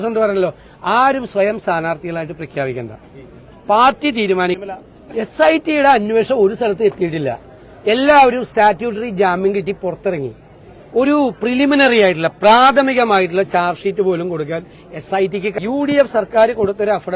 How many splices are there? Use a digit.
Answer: 2